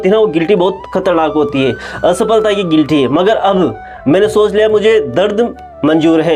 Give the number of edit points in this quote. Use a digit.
0